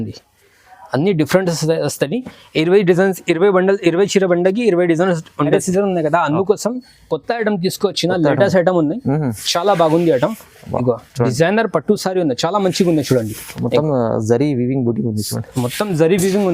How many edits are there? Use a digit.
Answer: 1